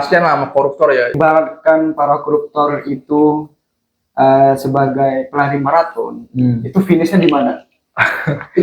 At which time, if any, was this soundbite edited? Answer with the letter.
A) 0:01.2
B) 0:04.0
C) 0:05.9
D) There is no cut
A